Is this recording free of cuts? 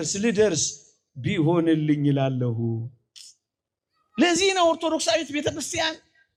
yes; 0 cuts

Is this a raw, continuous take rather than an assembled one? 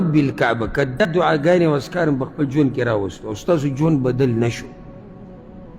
no; 1 cut; at 1.0 s

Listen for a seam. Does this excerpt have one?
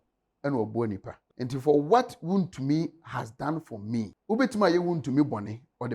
yes; 2 cuts; at 1.2 s, 4.2 s

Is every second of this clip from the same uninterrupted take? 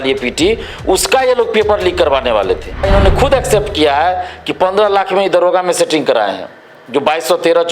no; 1 cut; at 2.9 s

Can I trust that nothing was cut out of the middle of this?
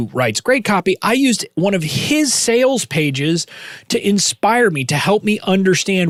yes; 0 cuts

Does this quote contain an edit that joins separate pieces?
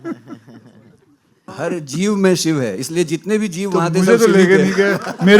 yes; 1 cut; at 1.6 s

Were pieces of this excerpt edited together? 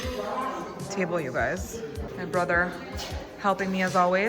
yes; 1 cut; at 2.1 s

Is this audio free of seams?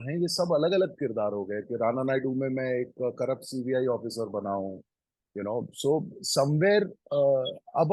yes; 0 cuts

